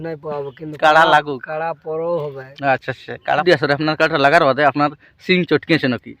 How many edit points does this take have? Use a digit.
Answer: 1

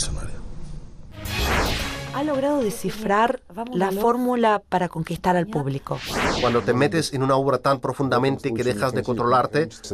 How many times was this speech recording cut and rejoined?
1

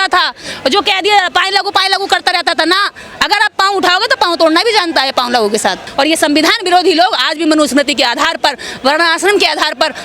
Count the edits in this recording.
1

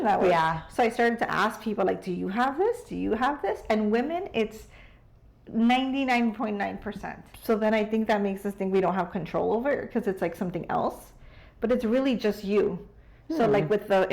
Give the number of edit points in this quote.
1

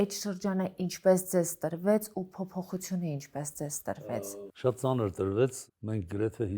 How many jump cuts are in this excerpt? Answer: 2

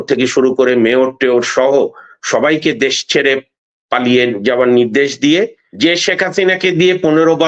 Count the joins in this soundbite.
1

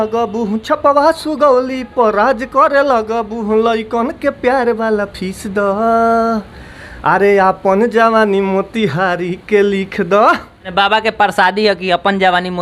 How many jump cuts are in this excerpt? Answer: 1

